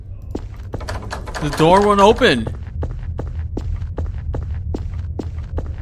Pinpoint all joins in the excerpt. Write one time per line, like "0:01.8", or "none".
none